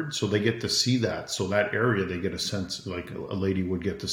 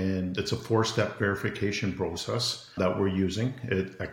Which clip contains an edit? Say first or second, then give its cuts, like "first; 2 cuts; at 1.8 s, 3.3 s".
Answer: second; 1 cut; at 2.7 s